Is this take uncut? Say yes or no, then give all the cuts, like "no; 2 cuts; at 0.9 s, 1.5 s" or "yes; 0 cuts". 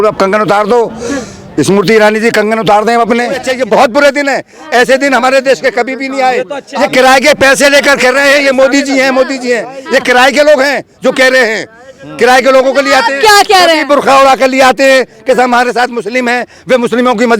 no; 2 cuts; at 3.5 s, 6.6 s